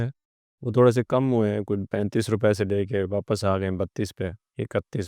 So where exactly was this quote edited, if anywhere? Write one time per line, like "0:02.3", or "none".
0:01.9

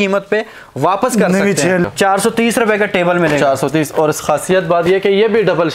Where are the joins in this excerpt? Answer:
0:01.8

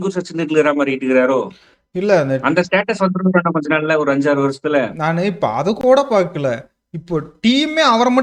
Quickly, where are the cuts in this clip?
none

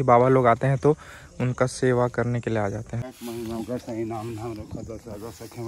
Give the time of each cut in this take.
0:02.9

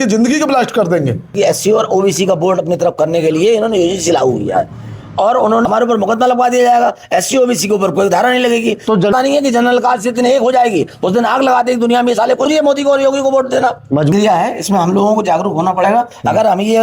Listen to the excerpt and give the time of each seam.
0:01.3
0:05.6
0:09.1
0:12.5
0:14.1

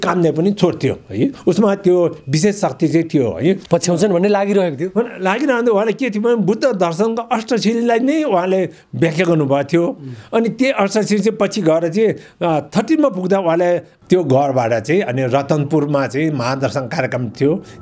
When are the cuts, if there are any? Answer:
0:03.6
0:13.9

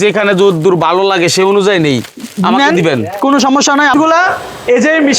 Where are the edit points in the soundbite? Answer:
0:03.9

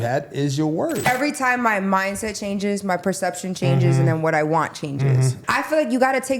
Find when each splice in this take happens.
0:01.1
0:05.4

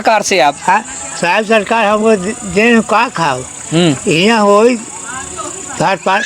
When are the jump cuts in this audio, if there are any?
none

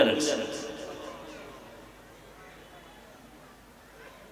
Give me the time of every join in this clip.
none

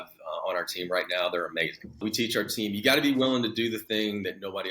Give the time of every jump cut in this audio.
0:02.0

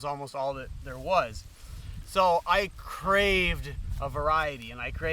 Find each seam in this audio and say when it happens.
none

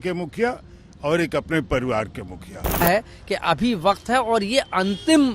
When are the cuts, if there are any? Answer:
0:02.8

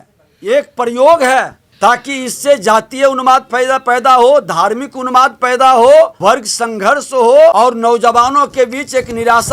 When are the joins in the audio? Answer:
0:01.6
0:06.1
0:07.5

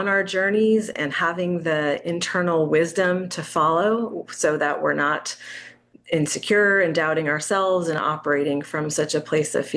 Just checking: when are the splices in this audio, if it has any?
none

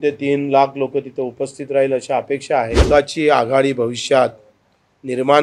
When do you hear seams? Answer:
0:02.8

